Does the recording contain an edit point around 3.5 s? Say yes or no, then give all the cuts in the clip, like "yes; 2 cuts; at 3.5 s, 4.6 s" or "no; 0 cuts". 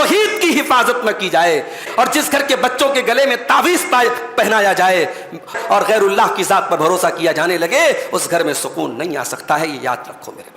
no; 2 cuts; at 1.9 s, 5.6 s